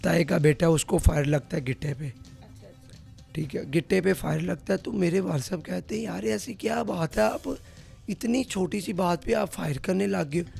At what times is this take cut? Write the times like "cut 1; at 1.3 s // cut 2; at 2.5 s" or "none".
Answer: none